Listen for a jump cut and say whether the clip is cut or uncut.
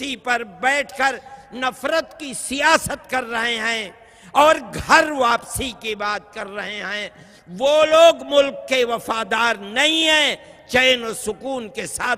uncut